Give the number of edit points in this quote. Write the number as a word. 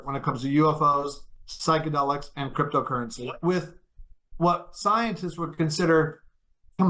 one